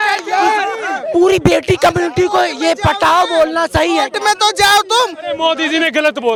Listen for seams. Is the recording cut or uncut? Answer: uncut